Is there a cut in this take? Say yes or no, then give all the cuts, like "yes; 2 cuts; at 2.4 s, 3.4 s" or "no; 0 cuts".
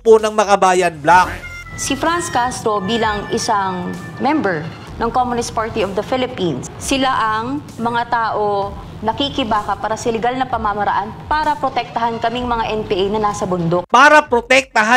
yes; 3 cuts; at 6.7 s, 8.8 s, 13.8 s